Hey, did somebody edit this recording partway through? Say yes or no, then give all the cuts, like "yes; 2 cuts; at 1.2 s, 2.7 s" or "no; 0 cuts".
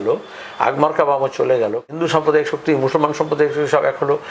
yes; 1 cut; at 2.2 s